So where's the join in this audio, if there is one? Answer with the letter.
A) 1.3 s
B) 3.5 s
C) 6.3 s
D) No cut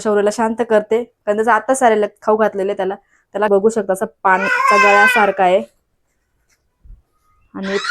B